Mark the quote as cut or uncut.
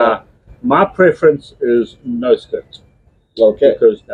uncut